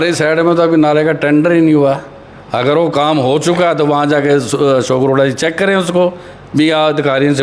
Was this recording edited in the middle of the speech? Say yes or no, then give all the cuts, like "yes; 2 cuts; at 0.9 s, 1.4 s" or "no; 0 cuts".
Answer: no; 0 cuts